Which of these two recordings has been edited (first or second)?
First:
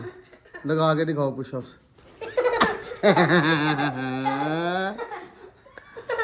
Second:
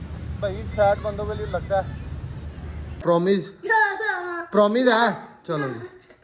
second